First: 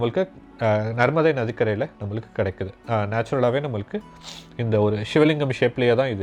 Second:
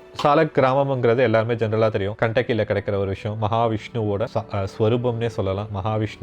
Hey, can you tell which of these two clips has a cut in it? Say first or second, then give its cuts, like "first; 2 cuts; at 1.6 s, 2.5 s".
second; 2 cuts; at 2.1 s, 4.3 s